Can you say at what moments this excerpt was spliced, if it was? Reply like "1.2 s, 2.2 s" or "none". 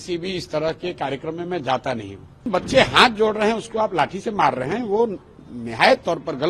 2.5 s

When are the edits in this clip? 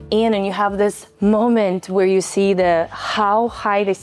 1.1 s

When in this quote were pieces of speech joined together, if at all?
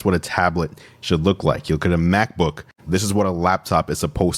2.7 s

